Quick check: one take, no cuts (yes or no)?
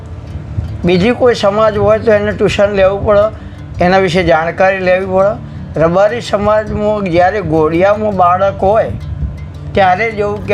yes